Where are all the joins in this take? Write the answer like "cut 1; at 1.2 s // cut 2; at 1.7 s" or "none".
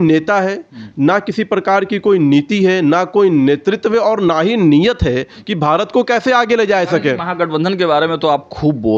none